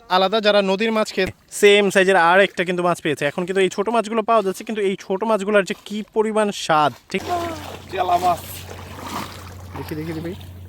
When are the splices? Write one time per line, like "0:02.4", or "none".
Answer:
0:01.4
0:07.2

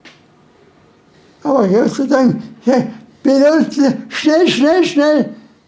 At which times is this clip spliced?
0:01.1

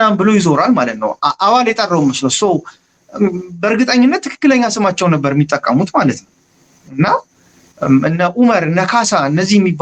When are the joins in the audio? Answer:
none

